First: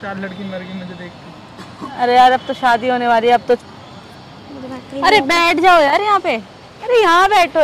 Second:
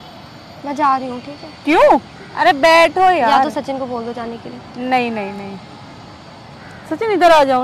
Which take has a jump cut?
first; 1 cut; at 3.6 s

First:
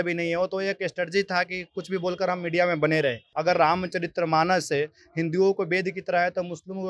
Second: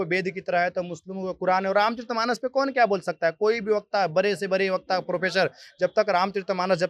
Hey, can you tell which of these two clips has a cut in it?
first; 1 cut; at 3.3 s

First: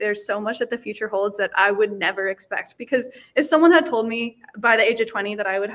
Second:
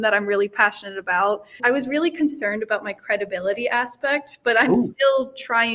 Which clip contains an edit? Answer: second; 1 cut; at 1.6 s

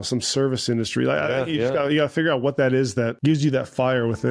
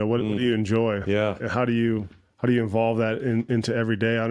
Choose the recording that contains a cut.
first; 1 cut; at 3.1 s

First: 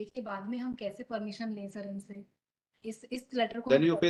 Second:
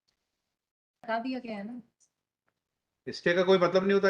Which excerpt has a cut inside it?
second; 1 cut; at 1.1 s

